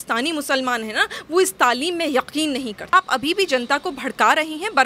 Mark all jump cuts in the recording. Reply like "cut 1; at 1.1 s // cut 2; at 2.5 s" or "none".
cut 1; at 2.9 s